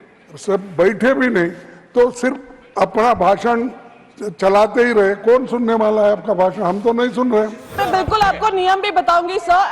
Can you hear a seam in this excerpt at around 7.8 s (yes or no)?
yes